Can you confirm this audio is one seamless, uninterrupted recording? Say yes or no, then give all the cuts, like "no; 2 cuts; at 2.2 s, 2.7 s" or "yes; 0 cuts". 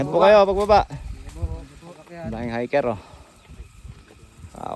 yes; 0 cuts